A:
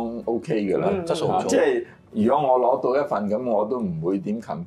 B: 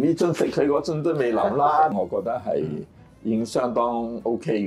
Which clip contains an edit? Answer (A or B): B